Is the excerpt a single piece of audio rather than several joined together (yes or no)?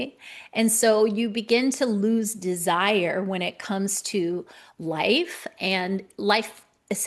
yes